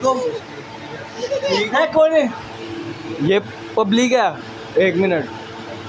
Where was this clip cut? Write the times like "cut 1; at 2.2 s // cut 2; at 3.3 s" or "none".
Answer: none

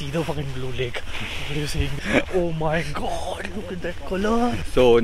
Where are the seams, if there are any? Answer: cut 1; at 2.0 s

